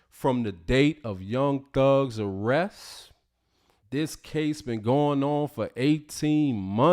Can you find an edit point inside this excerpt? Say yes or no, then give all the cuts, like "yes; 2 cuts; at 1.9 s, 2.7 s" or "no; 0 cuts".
no; 0 cuts